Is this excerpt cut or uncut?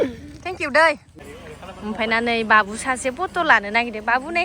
cut